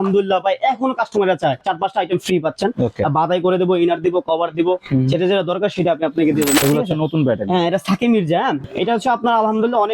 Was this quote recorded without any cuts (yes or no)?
no